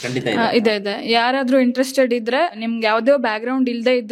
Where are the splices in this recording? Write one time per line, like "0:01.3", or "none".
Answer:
0:02.6